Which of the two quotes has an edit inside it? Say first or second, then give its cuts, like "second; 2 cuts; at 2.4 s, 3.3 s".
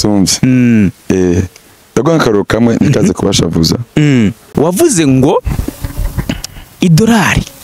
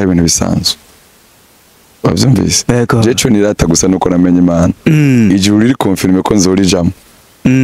first; 1 cut; at 4.4 s